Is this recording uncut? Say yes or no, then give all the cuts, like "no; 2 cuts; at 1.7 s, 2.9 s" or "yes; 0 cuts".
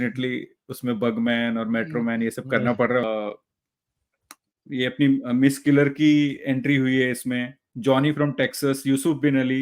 no; 1 cut; at 3.0 s